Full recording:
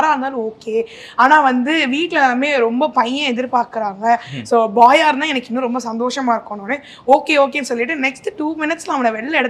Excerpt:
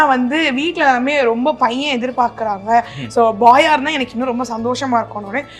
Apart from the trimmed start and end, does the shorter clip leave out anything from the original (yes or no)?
no